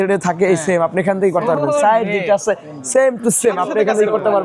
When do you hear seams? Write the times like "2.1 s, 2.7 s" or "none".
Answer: none